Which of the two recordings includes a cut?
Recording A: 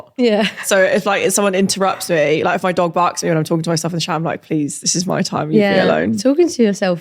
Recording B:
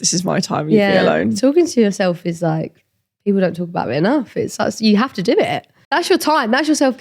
B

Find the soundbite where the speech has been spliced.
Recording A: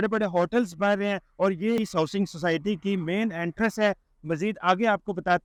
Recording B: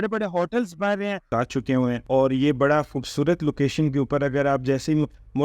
B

